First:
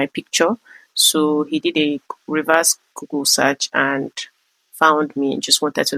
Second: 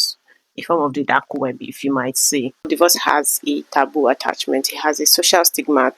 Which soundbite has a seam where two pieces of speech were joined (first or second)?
second